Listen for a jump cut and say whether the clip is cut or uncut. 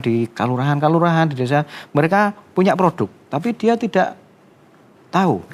uncut